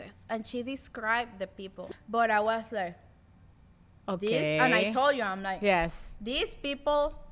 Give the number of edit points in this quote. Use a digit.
1